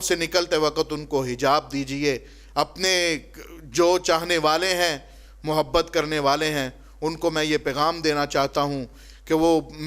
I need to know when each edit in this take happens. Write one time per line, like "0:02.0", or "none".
none